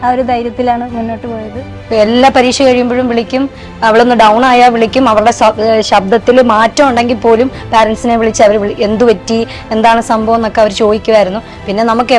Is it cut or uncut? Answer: cut